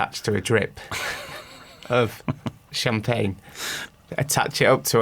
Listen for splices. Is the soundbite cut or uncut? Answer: cut